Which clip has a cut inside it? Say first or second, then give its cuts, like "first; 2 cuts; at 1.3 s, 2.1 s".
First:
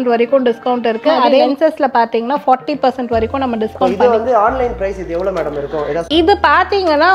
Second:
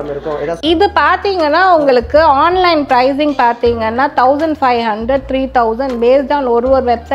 first; 2 cuts; at 1.5 s, 3.8 s